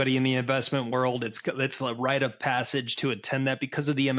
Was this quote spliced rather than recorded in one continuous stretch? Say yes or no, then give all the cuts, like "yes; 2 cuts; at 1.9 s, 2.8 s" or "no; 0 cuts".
no; 0 cuts